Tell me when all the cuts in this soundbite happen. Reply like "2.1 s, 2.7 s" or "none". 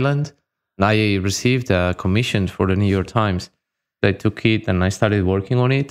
0.8 s, 4.0 s